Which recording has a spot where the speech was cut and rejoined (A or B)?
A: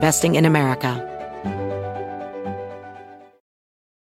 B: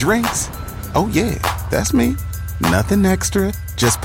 A